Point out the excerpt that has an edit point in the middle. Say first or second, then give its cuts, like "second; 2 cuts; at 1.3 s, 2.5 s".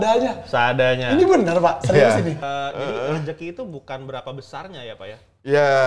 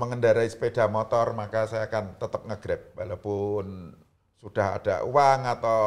first; 1 cut; at 2.4 s